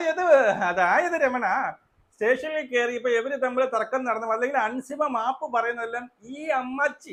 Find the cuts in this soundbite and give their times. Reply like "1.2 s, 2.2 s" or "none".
none